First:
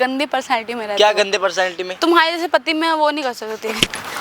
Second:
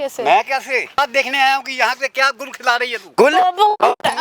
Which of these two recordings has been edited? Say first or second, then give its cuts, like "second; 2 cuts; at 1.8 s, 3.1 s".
second; 2 cuts; at 1.0 s, 3.0 s